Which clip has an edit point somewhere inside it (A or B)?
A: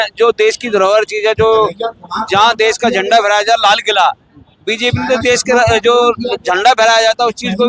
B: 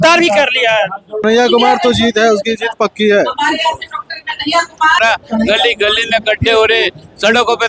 B